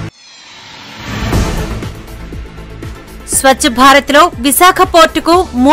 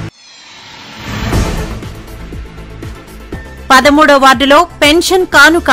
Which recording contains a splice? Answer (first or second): first